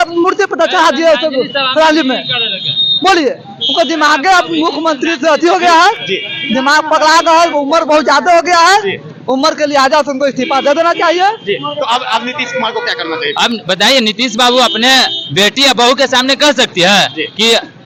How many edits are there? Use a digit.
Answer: 0